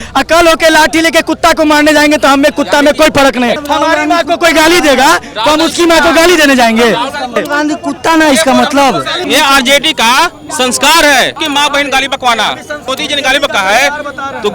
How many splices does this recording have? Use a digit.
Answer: 5